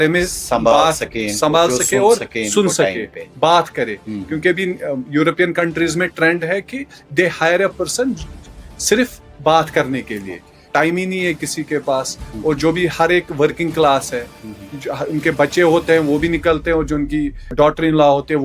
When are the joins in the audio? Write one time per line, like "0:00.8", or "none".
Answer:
0:10.5
0:17.5